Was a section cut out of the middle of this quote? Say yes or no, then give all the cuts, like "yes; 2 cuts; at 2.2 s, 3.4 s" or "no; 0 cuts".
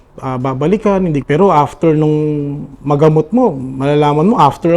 yes; 1 cut; at 1.2 s